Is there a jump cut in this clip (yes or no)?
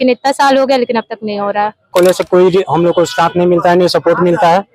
yes